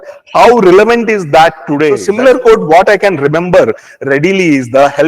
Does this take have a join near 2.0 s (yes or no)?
yes